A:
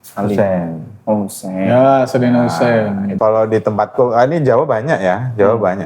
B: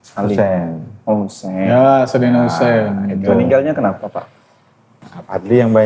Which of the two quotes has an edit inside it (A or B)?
A